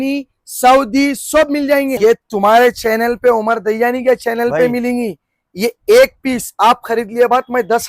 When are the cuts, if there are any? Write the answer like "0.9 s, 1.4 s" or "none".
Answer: 1.9 s